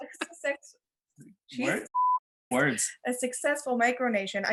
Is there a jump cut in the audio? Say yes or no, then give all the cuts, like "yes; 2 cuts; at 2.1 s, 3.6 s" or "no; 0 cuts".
no; 0 cuts